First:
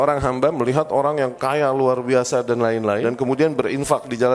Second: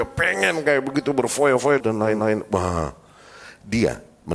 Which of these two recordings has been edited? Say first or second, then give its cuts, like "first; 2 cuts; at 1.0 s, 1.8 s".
first; 1 cut; at 3.0 s